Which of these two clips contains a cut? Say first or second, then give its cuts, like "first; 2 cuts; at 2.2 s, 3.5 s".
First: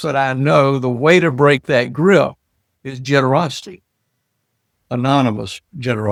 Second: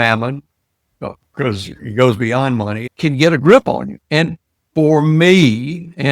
second; 1 cut; at 2.9 s